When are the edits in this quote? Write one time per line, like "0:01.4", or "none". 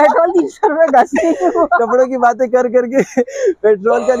none